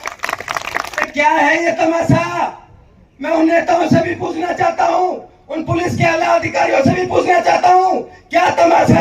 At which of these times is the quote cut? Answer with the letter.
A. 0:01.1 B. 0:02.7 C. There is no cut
A